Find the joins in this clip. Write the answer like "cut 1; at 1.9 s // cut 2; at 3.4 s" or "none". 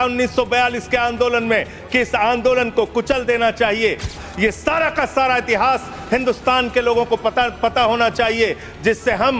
cut 1; at 4.2 s

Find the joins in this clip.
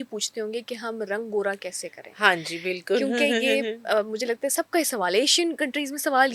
none

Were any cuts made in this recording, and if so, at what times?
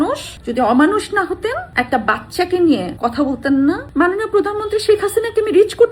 cut 1; at 2.9 s // cut 2; at 3.9 s

